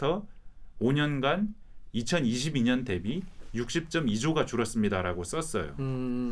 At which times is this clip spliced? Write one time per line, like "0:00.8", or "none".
none